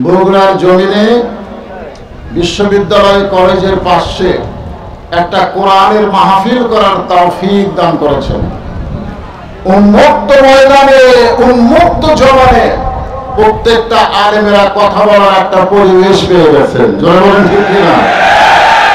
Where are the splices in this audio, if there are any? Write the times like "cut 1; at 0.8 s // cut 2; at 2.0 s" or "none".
none